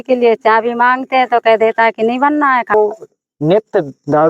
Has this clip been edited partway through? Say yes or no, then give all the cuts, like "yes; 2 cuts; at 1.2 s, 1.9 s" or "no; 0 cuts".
yes; 1 cut; at 2.7 s